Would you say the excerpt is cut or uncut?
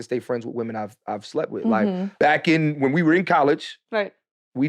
cut